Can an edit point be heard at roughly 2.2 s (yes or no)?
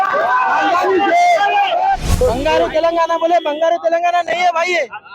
yes